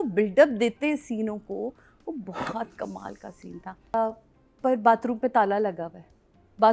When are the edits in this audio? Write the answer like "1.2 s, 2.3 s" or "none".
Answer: 3.9 s